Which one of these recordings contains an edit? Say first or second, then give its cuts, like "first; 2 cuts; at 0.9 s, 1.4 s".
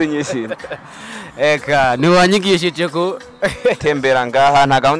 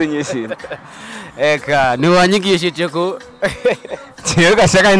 first; 1 cut; at 3.8 s